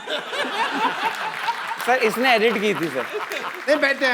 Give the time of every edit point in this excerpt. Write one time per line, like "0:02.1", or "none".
none